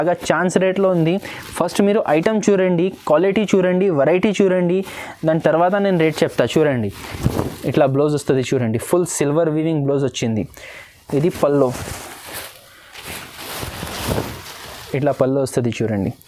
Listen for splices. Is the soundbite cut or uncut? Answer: uncut